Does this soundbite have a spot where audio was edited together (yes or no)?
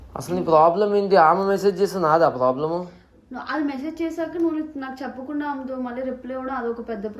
no